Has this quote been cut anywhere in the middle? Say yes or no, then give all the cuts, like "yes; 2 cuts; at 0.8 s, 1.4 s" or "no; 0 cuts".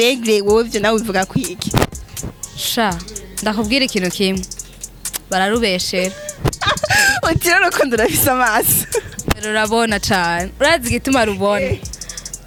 no; 0 cuts